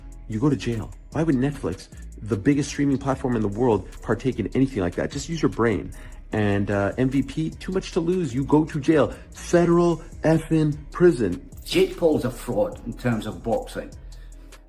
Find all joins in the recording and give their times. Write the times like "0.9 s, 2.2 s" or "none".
11.4 s